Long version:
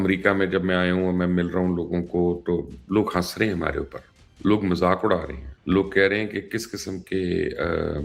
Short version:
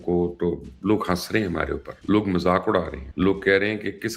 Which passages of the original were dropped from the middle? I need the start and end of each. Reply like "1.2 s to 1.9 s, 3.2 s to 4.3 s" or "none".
3.9 s to 4.2 s, 5.4 s to 5.5 s